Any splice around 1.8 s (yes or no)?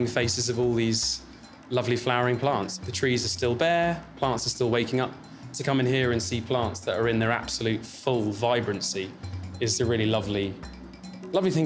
no